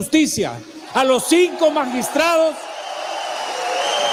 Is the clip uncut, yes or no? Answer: yes